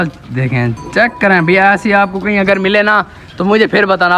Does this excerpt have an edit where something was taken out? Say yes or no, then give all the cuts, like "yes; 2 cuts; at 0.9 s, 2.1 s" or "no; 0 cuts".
no; 0 cuts